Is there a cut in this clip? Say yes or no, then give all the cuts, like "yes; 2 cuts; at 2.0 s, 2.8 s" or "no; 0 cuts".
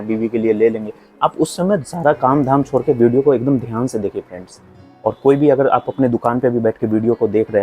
yes; 1 cut; at 1.8 s